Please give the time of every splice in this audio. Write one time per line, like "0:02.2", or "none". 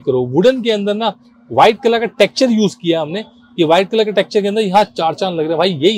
none